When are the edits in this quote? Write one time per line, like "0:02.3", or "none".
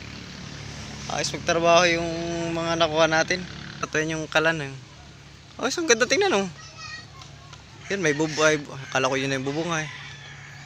0:03.9